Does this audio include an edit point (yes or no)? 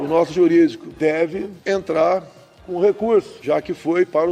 yes